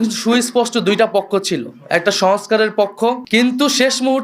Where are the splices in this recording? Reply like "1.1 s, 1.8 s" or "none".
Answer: 3.2 s